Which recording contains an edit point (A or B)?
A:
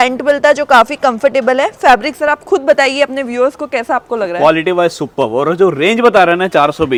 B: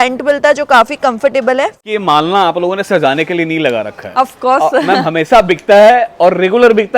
B